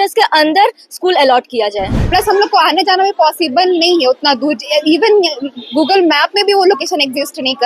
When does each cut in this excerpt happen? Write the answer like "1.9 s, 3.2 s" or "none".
2.0 s